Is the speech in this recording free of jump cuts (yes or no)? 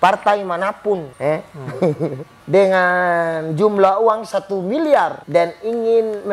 no